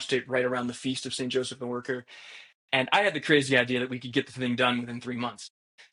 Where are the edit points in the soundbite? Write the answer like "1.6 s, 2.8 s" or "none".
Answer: none